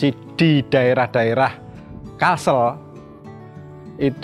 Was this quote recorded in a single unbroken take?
yes; 0 cuts

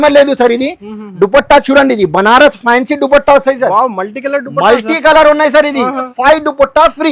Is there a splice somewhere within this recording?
yes; 1 cut; at 6.1 s

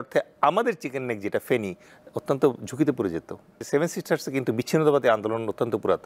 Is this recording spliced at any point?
yes; 1 cut; at 3.6 s

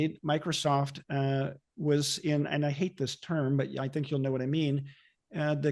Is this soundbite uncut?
yes; 0 cuts

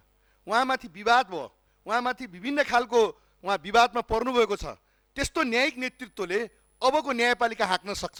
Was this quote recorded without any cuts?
yes; 0 cuts

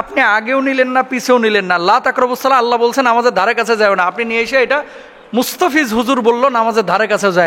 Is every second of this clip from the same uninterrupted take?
yes; 0 cuts

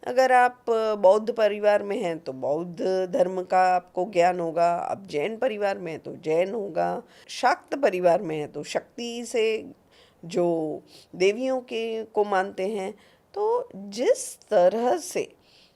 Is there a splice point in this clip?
yes; 1 cut; at 7.2 s

